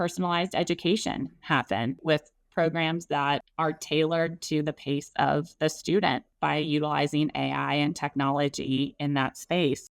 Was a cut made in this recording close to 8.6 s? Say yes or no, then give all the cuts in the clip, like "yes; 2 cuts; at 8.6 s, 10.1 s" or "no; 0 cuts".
no; 3 cuts; at 2.0 s, 3.5 s, 6.3 s